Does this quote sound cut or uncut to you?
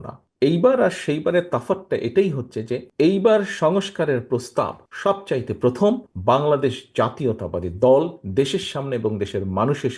uncut